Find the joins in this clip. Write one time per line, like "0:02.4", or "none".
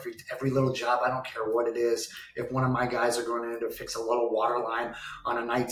none